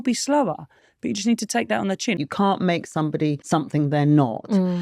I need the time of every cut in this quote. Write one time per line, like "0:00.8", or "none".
0:02.2
0:03.4